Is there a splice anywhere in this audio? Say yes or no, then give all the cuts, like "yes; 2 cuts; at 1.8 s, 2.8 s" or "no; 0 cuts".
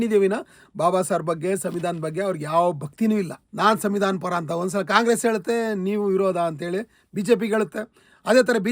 yes; 1 cut; at 3.4 s